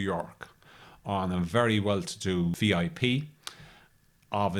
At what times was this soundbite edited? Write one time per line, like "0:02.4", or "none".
0:02.5